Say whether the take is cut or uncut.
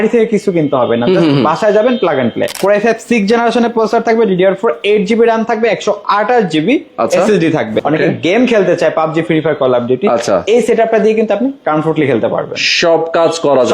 cut